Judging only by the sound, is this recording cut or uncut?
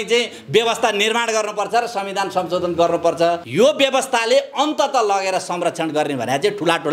cut